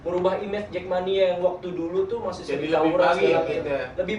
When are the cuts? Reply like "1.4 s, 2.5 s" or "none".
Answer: none